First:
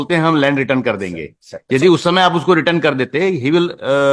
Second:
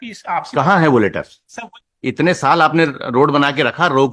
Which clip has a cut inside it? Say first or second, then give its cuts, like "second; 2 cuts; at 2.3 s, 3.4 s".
second; 1 cut; at 1.8 s